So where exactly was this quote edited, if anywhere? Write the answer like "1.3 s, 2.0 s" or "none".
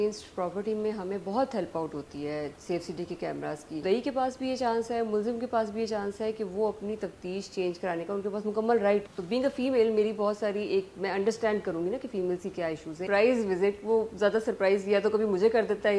3.8 s, 9.1 s, 13.0 s